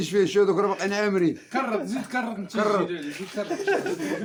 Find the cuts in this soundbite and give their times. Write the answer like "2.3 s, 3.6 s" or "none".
none